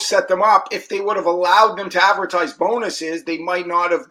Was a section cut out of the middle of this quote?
no; 0 cuts

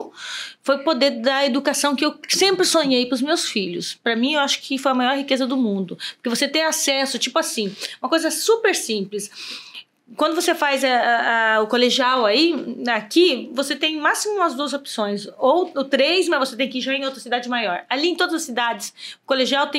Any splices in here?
no; 0 cuts

